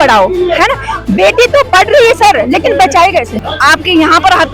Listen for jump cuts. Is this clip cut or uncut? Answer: cut